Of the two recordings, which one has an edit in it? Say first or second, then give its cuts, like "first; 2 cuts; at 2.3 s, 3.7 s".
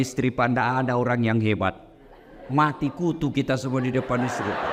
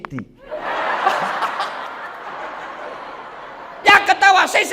second; 1 cut; at 2.2 s